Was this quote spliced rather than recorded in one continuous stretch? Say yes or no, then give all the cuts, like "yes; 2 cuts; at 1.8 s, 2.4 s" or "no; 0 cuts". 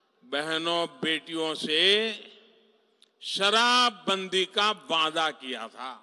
no; 0 cuts